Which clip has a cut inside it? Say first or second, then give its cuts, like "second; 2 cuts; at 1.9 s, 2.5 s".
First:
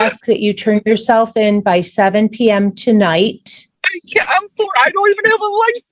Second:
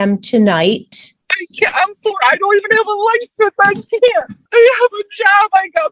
second; 1 cut; at 4.4 s